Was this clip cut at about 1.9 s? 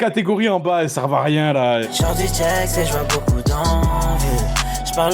yes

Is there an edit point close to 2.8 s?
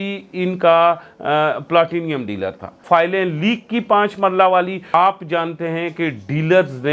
yes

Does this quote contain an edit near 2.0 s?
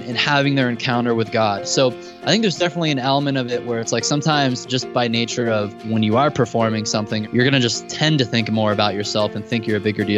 no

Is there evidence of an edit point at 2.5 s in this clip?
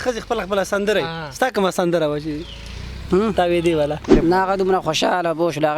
no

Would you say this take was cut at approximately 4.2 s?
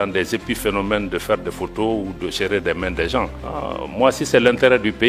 no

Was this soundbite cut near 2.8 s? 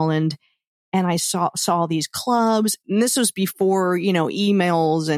yes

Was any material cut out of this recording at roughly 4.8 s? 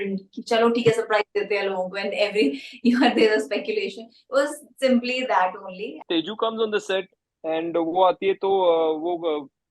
no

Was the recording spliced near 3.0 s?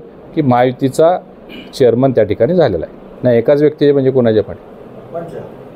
yes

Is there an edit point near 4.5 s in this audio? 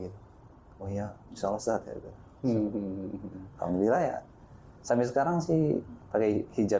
no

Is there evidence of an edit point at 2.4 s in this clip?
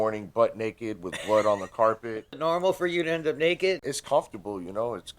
yes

